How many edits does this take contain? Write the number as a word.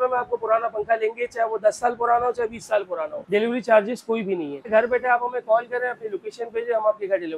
two